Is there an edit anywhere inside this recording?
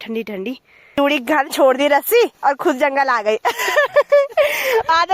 yes; 1 cut; at 0.9 s

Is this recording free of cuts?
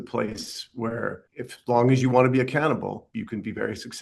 no; 2 cuts; at 1.2 s, 3.0 s

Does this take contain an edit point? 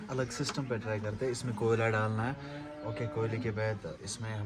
no; 0 cuts

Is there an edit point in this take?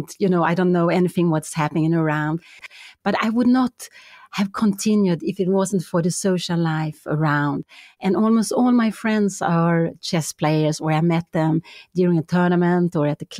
yes; 1 cut; at 2.6 s

